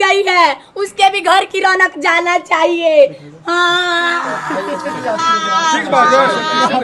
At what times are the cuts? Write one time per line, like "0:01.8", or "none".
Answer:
none